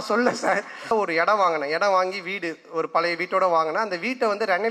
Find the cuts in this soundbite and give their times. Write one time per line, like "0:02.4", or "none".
0:00.9